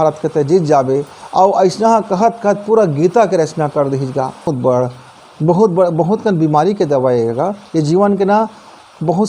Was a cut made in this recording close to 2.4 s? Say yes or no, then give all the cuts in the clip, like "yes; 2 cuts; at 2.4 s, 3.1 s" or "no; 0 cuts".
no; 1 cut; at 4.5 s